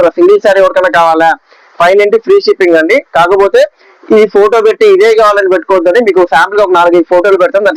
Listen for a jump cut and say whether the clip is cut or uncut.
uncut